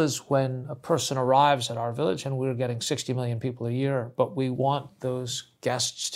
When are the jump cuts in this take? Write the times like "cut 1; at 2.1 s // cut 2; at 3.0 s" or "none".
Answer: none